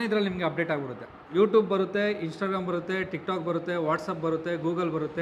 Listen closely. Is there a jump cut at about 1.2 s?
yes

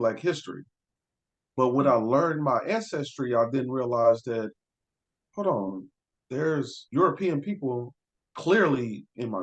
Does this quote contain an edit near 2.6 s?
no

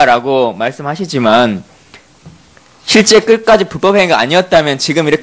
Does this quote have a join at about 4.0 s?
yes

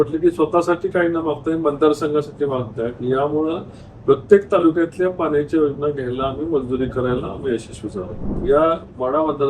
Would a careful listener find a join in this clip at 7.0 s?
no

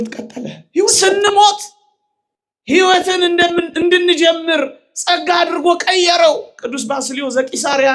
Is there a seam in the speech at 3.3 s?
no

